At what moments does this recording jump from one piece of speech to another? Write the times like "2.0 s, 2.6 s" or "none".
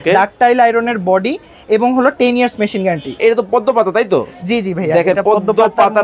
3.2 s